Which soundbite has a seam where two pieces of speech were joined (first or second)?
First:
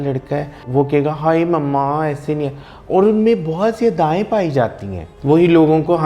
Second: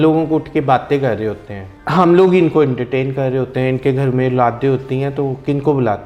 first